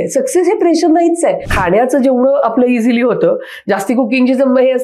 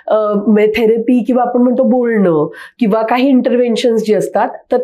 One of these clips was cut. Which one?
first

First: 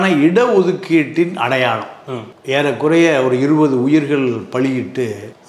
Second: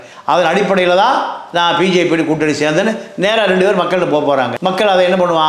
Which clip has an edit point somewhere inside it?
second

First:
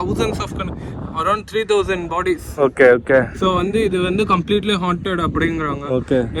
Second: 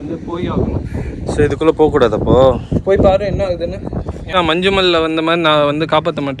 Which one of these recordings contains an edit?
second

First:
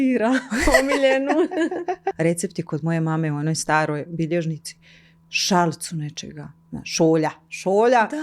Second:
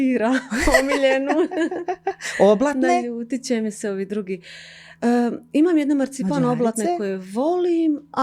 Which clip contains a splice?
first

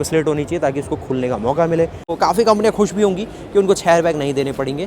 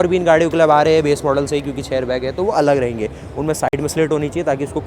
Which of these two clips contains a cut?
first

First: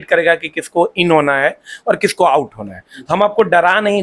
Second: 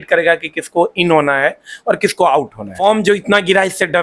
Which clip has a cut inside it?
second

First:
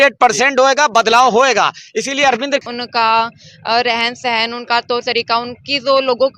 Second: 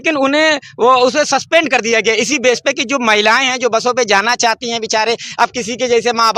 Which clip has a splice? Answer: first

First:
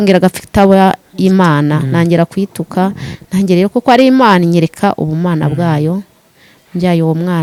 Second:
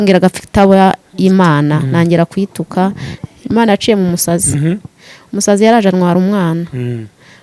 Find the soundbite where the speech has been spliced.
second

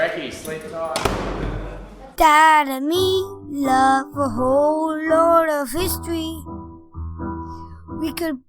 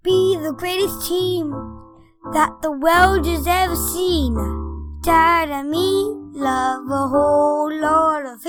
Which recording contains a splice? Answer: first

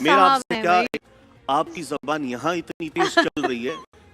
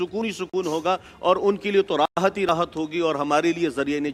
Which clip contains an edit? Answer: first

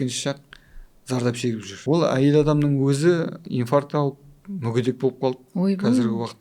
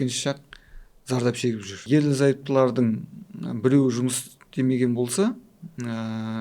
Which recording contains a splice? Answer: first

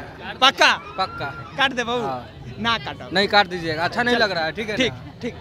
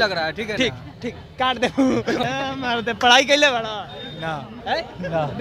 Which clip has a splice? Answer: second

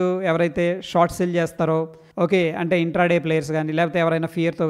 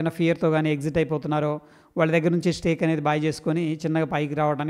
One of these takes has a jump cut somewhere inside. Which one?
first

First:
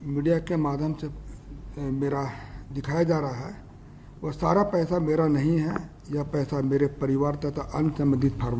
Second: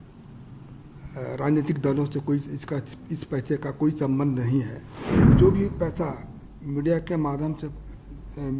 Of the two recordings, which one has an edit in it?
second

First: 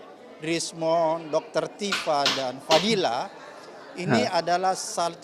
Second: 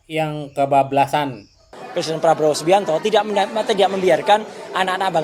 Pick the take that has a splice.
second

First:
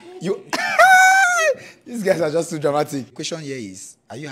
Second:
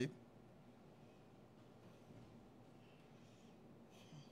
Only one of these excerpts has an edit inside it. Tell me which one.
first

